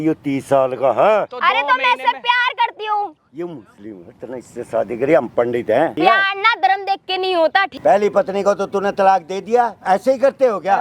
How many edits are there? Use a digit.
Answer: 4